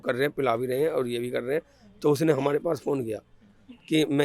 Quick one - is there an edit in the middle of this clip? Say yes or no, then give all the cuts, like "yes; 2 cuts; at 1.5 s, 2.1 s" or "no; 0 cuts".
no; 0 cuts